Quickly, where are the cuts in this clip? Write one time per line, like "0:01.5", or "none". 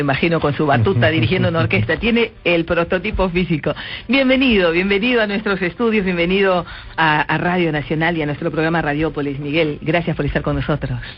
none